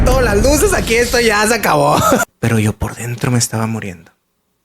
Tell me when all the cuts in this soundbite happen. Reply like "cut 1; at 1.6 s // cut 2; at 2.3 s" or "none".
cut 1; at 2.2 s